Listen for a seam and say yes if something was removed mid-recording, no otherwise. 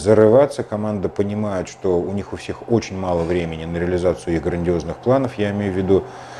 no